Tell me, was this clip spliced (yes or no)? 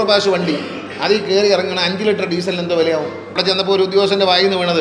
yes